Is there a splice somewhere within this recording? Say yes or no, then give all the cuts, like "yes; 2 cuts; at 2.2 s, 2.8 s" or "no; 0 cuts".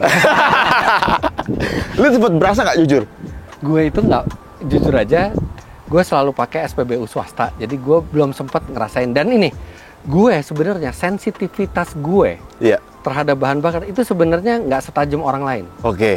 no; 0 cuts